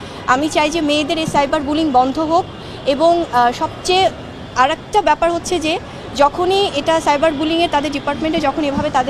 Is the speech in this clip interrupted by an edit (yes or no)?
no